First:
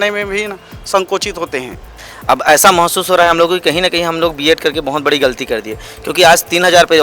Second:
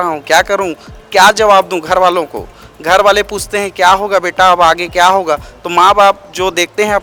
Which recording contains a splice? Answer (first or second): first